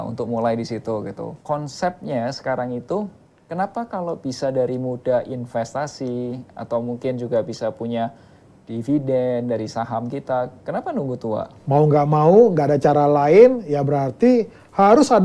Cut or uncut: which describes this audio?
cut